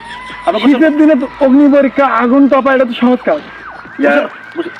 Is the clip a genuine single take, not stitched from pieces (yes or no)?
yes